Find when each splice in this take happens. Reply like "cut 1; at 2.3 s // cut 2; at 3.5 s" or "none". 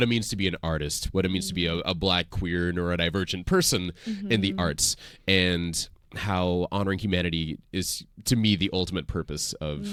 none